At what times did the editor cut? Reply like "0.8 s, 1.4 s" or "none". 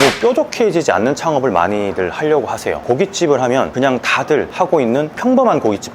2.8 s